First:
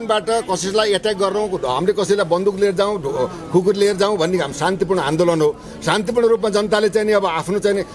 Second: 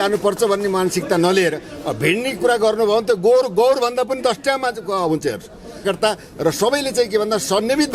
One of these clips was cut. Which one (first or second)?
second